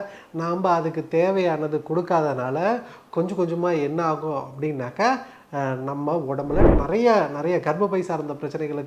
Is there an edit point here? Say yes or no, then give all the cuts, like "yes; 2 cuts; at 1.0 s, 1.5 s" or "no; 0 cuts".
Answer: yes; 1 cut; at 6.7 s